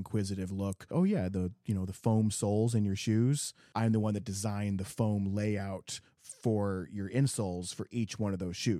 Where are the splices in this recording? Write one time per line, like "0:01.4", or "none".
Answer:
0:00.8
0:03.6